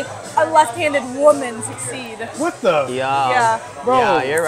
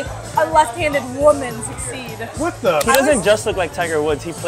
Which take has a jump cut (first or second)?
second